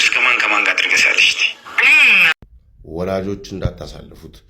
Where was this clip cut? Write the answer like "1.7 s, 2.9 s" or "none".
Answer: 2.3 s